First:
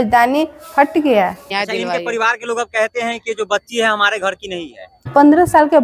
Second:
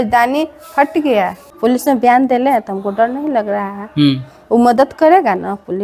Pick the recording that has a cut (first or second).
first